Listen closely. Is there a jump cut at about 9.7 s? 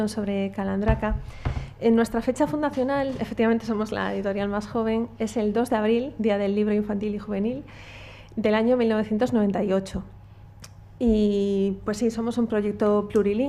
no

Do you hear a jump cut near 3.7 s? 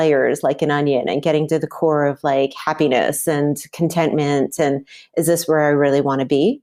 no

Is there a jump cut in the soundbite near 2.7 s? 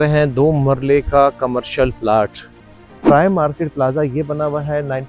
yes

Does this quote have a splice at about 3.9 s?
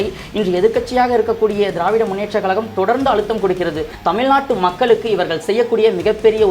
yes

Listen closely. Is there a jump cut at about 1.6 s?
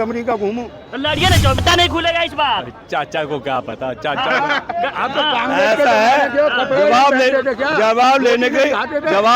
yes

